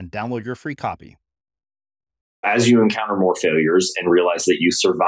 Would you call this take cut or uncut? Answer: cut